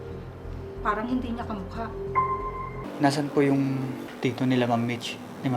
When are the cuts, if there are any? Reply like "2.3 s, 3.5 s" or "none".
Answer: 2.8 s, 4.1 s